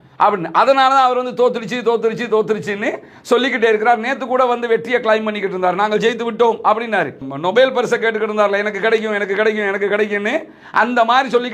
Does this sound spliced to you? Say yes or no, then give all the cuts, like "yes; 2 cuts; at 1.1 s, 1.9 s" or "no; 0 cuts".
no; 0 cuts